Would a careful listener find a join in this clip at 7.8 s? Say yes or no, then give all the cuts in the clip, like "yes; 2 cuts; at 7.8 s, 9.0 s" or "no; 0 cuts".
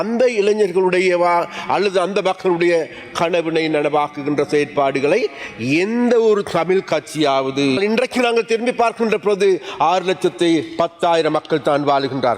yes; 1 cut; at 7.8 s